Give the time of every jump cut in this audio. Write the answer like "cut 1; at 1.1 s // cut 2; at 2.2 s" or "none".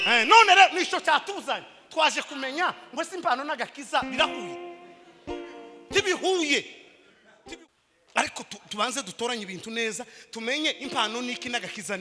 cut 1; at 7.4 s